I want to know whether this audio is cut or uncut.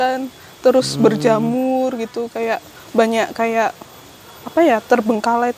uncut